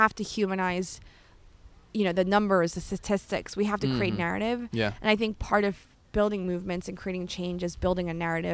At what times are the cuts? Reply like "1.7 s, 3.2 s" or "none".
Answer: none

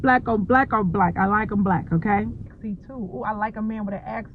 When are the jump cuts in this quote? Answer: 2.5 s

